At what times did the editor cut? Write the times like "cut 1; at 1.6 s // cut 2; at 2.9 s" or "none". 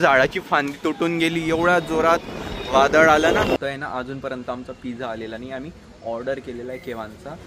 cut 1; at 3.6 s